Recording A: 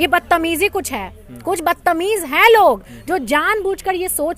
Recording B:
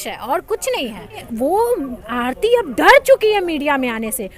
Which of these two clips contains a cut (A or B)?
B